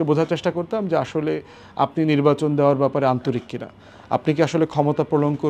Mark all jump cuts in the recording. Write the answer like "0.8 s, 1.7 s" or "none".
none